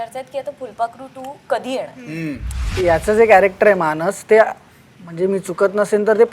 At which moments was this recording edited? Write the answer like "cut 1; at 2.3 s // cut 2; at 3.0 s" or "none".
cut 1; at 2.7 s